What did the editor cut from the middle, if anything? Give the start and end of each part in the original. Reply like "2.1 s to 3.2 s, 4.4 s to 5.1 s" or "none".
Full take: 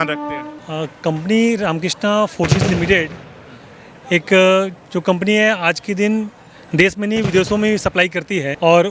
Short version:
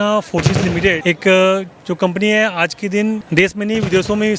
3.1 s to 4.1 s, 6.3 s to 6.7 s